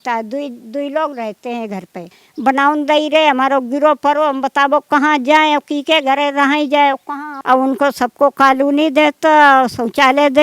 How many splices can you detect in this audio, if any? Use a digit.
2